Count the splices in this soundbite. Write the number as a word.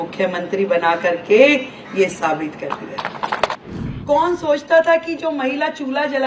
one